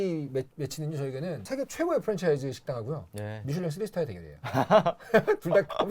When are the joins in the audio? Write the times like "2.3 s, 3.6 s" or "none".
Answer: 1.4 s

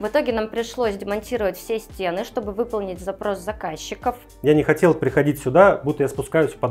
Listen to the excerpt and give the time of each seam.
4.3 s

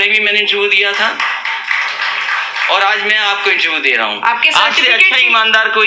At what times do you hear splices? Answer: none

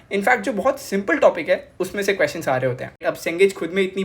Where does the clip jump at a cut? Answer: 3.0 s

